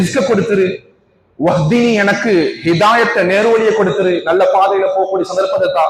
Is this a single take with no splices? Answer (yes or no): yes